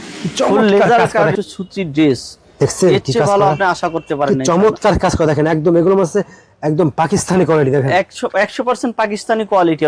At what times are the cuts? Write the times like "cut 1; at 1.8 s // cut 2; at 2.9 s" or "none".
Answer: cut 1; at 1.3 s